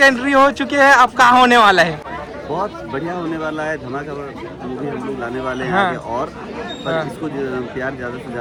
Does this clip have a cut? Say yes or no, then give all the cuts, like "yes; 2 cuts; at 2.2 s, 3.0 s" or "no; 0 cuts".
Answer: no; 0 cuts